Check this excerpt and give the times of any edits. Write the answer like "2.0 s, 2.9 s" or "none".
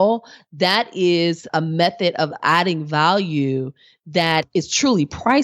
1.5 s, 2.4 s, 4.5 s